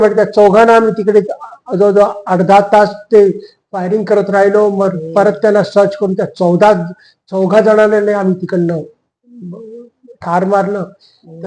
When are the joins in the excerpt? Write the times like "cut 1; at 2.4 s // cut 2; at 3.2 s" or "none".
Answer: none